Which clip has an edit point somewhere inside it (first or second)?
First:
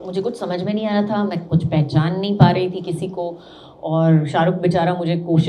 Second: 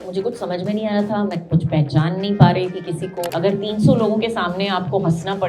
second